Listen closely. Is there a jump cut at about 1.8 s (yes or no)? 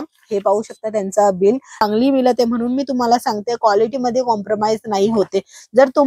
yes